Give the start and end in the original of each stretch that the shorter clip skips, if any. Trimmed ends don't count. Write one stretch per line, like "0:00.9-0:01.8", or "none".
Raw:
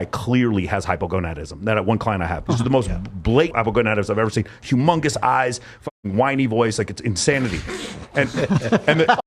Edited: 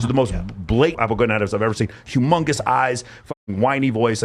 none